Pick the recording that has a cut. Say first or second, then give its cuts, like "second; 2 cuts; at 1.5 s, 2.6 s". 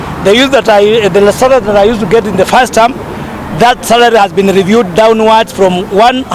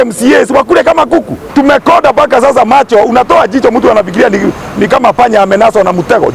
second; 1 cut; at 1.4 s